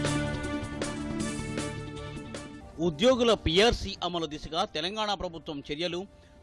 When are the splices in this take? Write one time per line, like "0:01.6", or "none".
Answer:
0:02.6